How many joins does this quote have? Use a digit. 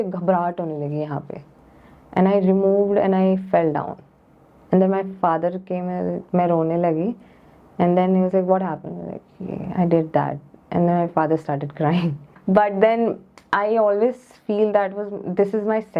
1